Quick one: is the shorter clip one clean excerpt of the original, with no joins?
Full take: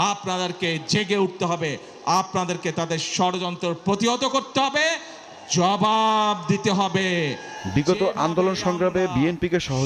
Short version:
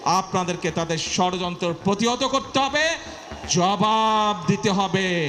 yes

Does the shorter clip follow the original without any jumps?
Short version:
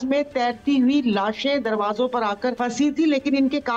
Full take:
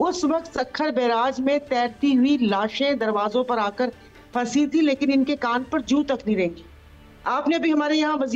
no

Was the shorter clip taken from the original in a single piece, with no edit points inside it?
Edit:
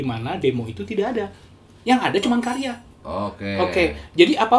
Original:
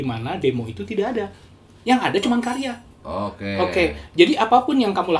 yes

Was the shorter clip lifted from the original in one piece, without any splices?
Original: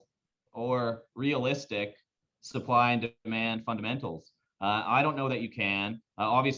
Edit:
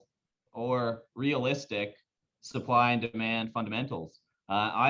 no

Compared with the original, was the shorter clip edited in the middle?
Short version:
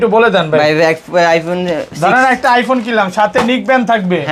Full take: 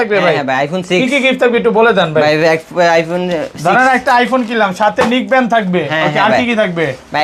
no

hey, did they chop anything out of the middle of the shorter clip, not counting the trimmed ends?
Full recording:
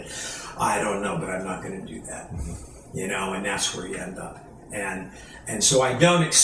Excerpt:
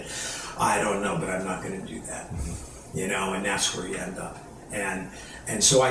no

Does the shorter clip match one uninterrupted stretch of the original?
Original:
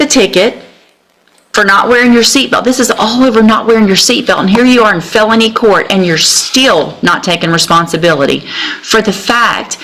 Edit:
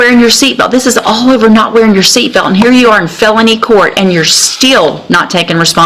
yes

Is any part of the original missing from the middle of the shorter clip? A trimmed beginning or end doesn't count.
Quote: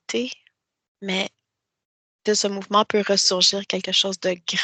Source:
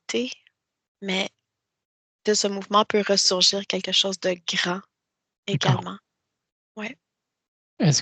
no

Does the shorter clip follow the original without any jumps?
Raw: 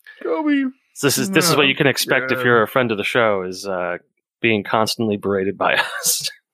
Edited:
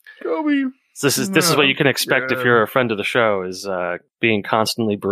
no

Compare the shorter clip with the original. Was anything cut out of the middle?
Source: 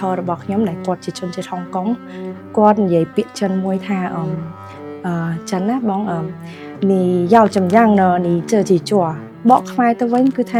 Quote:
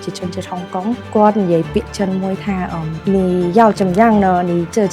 yes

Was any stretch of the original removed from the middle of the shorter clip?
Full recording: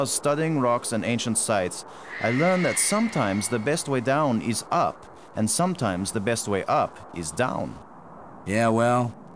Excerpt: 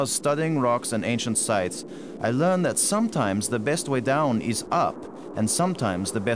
no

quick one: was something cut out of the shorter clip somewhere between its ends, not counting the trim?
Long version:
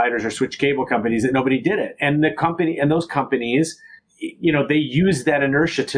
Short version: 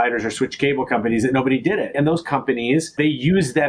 yes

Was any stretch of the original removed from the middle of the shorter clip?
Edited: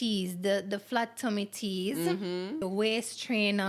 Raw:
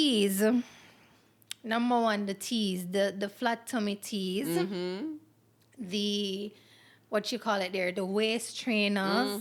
yes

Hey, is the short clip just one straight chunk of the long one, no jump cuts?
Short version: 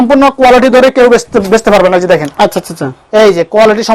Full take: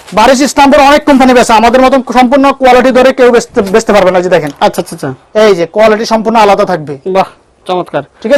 yes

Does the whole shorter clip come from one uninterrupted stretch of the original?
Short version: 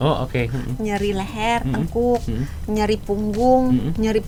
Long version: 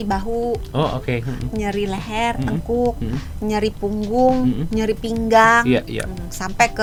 yes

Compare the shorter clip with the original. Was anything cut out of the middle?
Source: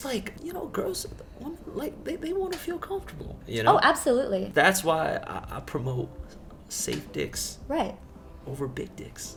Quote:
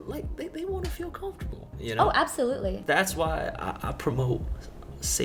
no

